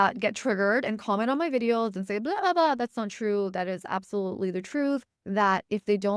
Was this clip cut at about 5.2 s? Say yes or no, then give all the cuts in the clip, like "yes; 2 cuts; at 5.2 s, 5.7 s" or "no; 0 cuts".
yes; 1 cut; at 5.2 s